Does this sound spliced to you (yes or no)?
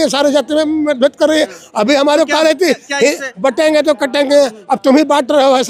no